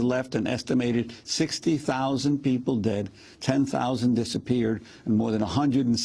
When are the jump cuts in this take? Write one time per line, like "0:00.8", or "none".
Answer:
0:03.5